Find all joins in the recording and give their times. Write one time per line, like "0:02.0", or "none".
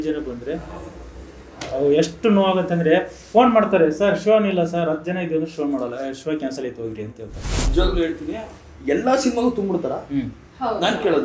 0:07.6